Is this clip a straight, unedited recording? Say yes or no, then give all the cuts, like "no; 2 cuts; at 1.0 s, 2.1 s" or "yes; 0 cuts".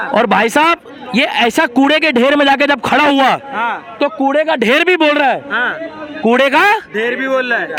yes; 0 cuts